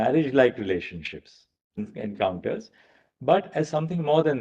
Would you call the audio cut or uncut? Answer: cut